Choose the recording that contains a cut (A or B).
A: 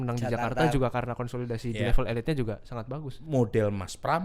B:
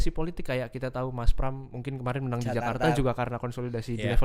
A